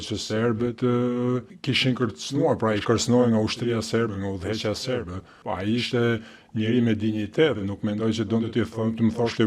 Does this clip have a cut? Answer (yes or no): yes